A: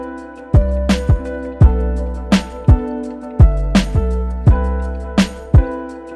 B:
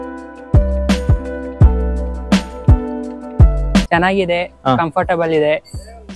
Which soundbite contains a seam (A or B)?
A